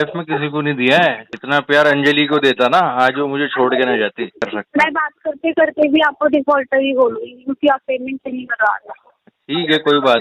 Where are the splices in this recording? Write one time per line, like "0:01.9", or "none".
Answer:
0:01.3
0:04.5